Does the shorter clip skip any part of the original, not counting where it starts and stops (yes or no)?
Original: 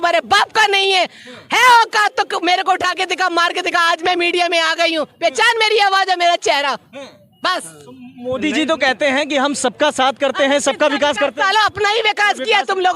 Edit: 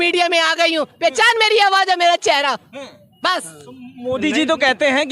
no